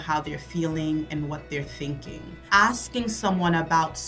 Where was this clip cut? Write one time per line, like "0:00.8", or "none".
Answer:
0:02.4